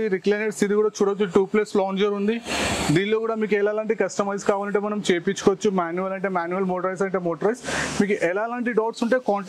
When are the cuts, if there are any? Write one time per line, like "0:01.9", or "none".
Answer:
none